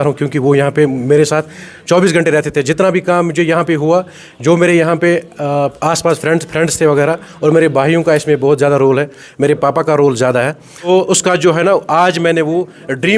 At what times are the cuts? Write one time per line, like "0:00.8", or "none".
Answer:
0:10.9

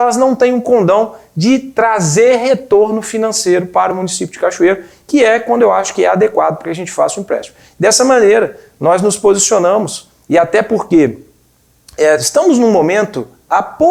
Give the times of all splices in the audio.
none

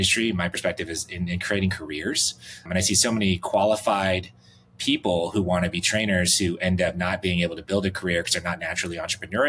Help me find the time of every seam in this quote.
0:02.7

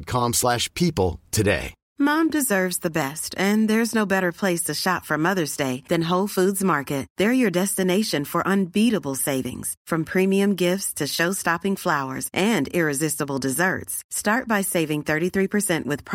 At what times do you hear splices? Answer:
0:01.8

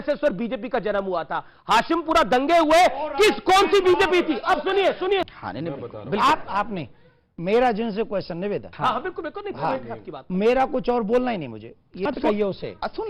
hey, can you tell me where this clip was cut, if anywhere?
0:05.3
0:12.0

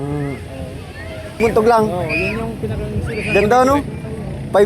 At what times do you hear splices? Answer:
0:01.4

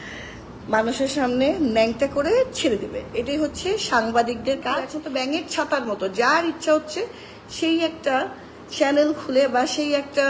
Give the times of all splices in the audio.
0:05.0

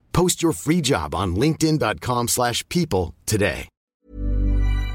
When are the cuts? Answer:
0:03.9

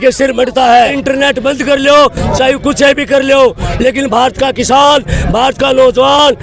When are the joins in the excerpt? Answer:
0:01.0

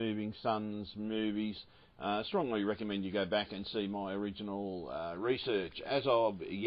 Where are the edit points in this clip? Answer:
none

